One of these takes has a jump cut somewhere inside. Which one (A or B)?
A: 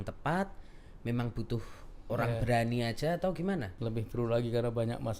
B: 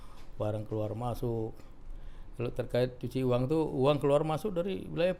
A